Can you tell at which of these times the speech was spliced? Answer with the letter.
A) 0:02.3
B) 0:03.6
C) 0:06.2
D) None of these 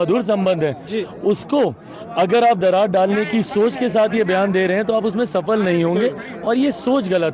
D